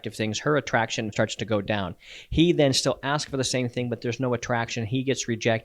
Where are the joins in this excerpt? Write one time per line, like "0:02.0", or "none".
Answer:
0:01.1